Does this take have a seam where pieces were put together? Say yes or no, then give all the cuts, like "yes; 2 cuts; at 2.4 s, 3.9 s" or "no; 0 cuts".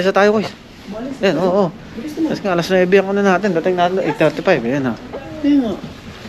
no; 0 cuts